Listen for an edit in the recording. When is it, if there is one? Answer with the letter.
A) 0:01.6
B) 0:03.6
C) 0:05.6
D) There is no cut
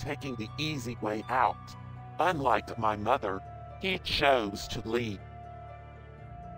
C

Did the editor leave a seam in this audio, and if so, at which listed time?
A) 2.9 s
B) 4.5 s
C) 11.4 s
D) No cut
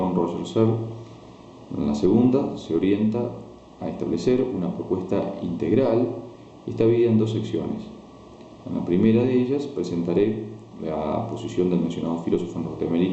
B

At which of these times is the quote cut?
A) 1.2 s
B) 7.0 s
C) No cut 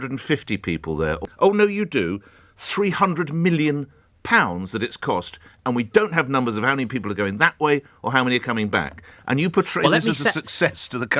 A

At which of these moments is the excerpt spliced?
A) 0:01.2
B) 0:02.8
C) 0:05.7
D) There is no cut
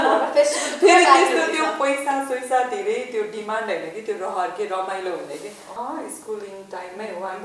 C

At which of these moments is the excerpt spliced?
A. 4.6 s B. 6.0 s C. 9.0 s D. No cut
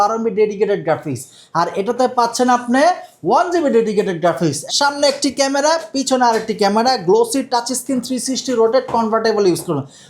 A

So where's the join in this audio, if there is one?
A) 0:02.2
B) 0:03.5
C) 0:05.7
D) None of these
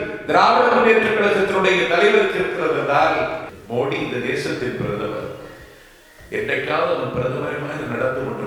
B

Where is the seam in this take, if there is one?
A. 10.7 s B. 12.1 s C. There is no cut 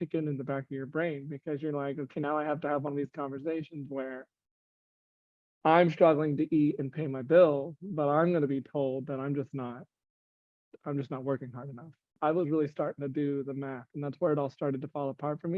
B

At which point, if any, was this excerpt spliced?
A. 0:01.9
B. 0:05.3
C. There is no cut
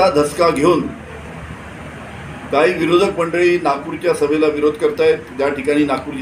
C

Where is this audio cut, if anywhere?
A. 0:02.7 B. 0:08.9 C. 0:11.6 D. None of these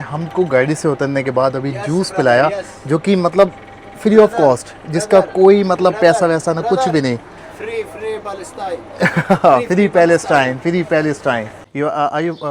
C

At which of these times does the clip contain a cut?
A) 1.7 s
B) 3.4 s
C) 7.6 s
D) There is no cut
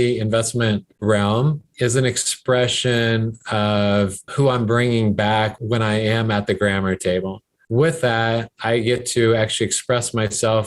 C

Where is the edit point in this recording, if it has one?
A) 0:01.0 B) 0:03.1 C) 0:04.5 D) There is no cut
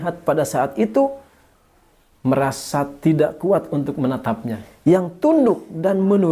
C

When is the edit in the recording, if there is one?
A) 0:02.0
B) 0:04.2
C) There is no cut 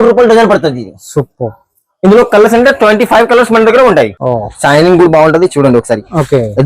B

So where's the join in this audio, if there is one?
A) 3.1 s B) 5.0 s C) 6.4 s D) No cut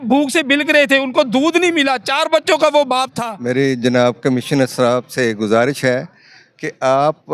A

